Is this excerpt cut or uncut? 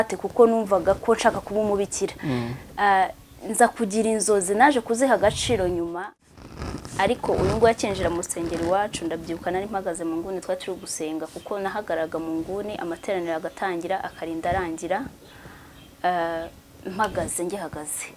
cut